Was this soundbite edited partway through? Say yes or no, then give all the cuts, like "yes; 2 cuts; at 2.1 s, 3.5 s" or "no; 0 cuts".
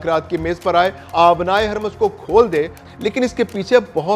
yes; 2 cuts; at 1.1 s, 2.8 s